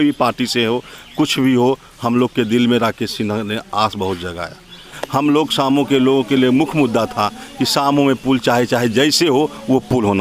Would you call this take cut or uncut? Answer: cut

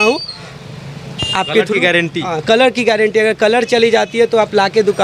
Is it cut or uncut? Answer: uncut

